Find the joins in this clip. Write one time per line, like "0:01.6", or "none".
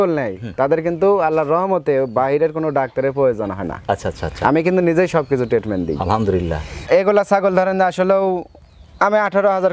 0:06.8